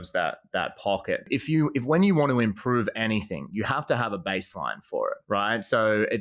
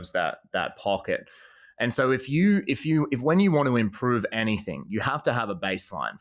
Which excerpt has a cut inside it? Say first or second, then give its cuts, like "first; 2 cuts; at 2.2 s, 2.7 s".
first; 2 cuts; at 1.3 s, 5.2 s